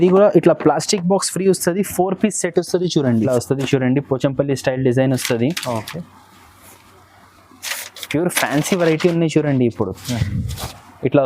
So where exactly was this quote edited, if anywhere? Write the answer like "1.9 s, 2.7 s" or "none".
3.3 s